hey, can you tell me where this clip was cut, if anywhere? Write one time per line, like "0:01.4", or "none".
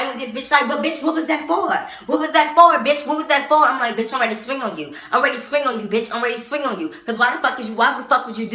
none

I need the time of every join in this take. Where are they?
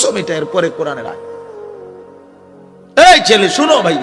none

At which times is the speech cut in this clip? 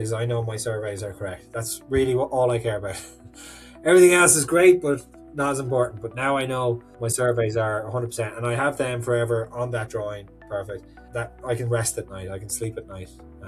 0:07.0
0:10.9

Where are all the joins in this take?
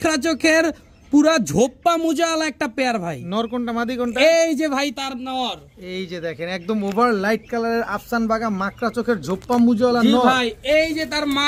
none

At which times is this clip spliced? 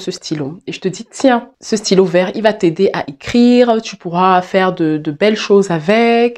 0:01.5

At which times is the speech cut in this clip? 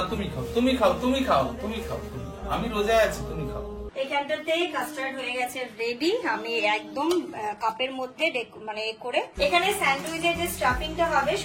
0:03.8
0:09.3

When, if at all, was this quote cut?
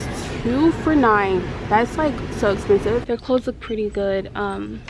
0:03.0

